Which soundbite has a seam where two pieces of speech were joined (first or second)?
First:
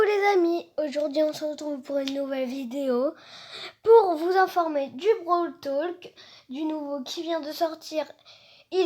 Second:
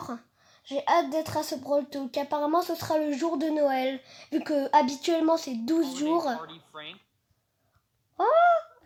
first